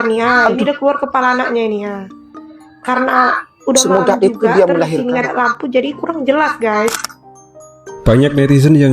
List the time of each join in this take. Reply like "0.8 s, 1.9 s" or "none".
none